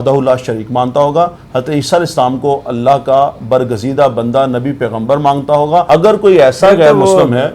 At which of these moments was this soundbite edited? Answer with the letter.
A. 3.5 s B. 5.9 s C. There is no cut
B